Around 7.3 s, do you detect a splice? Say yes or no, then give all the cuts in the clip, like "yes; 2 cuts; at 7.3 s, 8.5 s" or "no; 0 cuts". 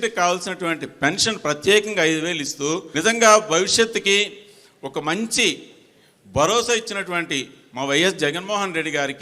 no; 1 cut; at 2.9 s